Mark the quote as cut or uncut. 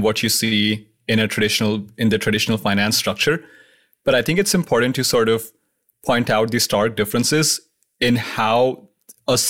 uncut